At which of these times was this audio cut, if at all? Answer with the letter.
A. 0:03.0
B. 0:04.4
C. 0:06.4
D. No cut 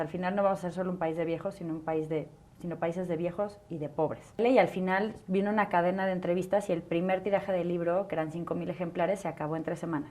B